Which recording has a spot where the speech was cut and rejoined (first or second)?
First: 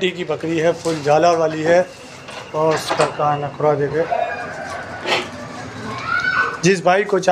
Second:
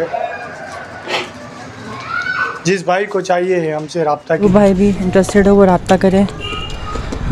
second